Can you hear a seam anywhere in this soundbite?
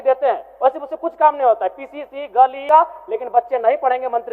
yes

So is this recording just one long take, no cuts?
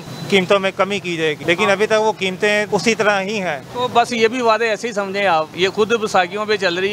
no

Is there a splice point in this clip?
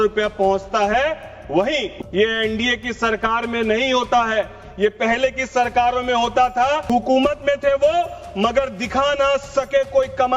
yes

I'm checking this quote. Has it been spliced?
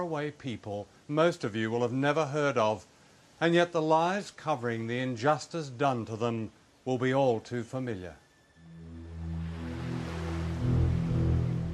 no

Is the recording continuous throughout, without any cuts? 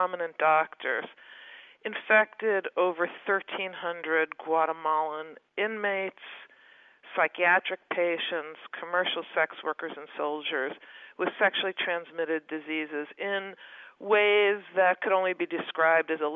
yes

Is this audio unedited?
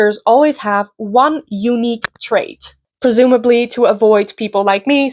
yes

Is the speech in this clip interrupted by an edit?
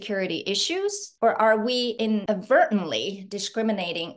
yes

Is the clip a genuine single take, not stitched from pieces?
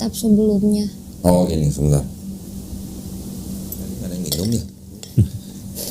no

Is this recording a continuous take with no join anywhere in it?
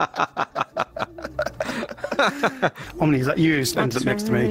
no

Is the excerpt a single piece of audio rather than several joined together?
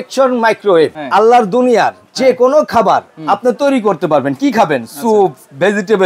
no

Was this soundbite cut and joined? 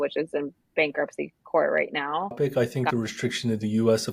yes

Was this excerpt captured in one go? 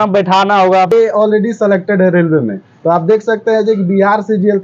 no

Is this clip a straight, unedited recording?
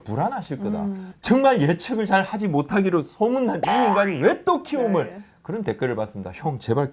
yes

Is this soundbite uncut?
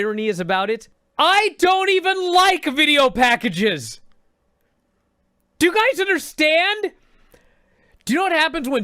no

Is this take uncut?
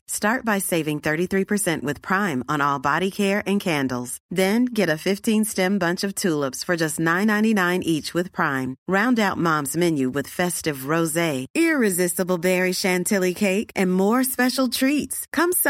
yes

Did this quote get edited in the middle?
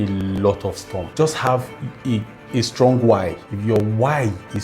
yes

